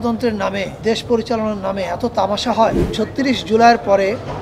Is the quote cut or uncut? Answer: cut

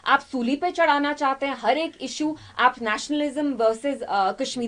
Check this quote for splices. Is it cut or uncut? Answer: uncut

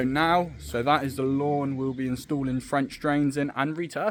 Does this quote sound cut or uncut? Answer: uncut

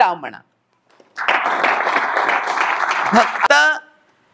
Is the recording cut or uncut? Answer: cut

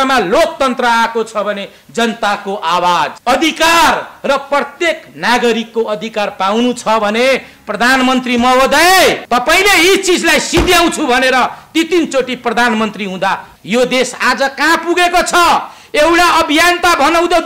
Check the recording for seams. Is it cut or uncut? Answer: cut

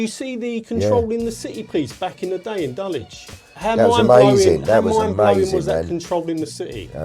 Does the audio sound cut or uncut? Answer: cut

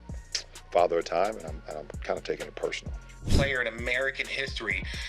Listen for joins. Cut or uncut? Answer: cut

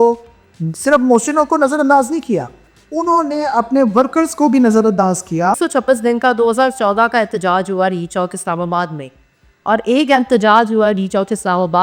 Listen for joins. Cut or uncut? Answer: cut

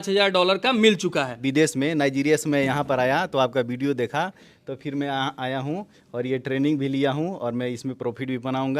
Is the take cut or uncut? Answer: cut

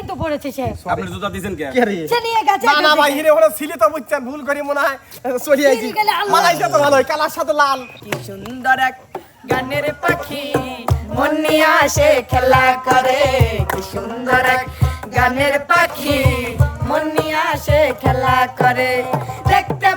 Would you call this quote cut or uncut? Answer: cut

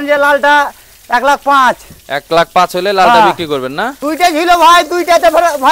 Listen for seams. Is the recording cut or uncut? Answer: cut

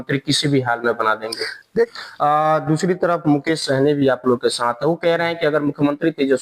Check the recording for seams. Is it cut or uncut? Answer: cut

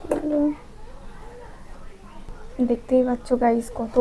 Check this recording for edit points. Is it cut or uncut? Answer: cut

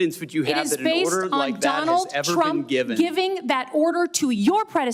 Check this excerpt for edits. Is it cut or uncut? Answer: uncut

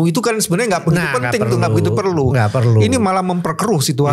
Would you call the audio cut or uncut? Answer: uncut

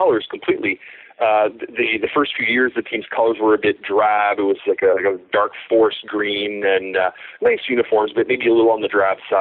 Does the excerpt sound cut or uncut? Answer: uncut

